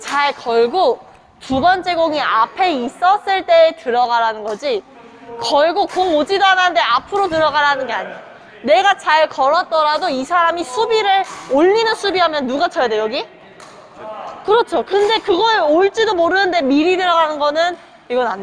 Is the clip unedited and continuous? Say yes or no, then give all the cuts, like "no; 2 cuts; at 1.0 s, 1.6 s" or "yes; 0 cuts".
yes; 0 cuts